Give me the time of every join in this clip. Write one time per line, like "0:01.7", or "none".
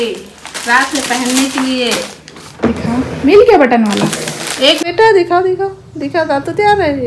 0:04.8